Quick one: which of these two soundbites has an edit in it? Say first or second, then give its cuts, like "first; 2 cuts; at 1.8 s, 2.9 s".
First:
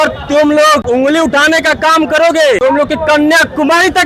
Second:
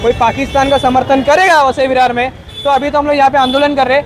first; 2 cuts; at 0.8 s, 2.6 s